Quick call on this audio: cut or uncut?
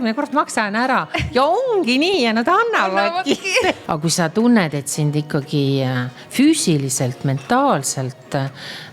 cut